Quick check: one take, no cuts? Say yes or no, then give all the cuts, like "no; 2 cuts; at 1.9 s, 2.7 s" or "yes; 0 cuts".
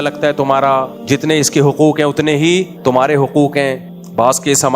no; 1 cut; at 3.8 s